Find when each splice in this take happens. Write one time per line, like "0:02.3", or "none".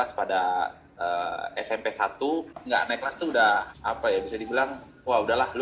0:02.6
0:03.7